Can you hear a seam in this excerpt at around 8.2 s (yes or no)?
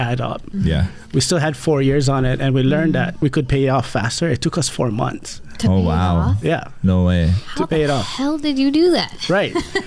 no